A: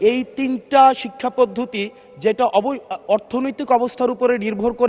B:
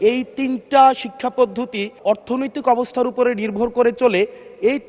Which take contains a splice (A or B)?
B